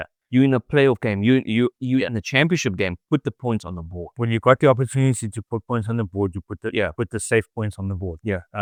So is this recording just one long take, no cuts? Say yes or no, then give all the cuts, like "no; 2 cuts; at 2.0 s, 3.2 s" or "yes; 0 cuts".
yes; 0 cuts